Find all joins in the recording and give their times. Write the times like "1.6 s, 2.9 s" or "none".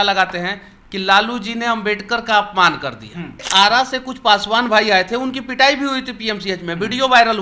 3.5 s